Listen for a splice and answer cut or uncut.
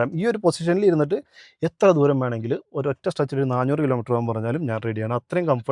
uncut